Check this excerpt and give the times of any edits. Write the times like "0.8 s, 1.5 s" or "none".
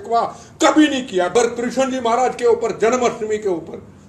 1.3 s